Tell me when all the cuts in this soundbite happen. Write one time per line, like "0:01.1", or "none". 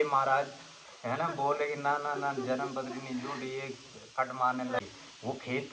0:04.8

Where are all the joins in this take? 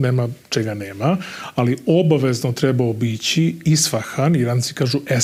none

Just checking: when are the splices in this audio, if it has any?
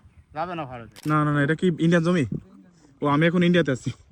0:00.9

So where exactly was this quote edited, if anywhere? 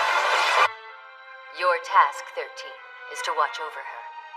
0:02.1

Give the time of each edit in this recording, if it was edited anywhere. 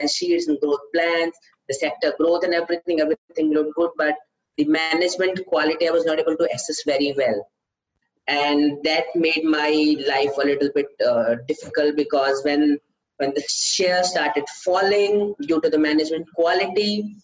none

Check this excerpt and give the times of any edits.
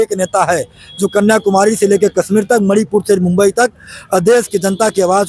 none

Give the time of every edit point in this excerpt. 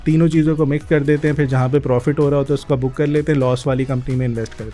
none

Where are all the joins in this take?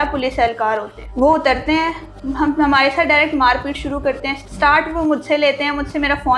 0:01.0
0:04.3

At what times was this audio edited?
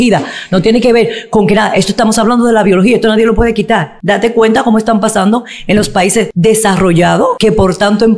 0:03.9
0:06.3
0:07.4

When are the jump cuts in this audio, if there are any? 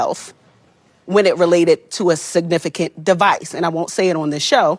none

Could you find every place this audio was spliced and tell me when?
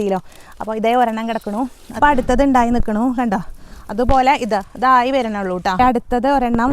0:02.0
0:05.8

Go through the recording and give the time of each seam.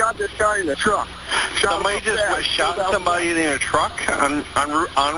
none

